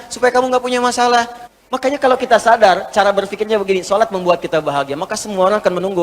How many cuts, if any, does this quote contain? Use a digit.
1